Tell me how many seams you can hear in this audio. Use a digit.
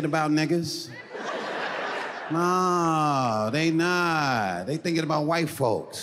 0